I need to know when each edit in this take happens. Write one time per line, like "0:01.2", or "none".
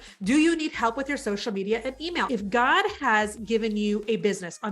0:02.3